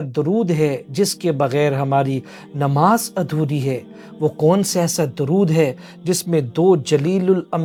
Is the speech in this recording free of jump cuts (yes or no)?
yes